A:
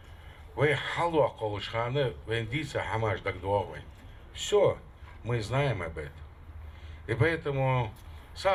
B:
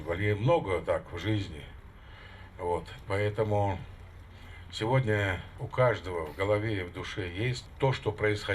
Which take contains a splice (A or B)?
B